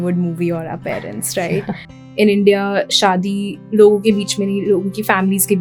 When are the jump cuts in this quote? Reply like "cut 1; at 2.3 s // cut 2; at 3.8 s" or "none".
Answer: cut 1; at 1.9 s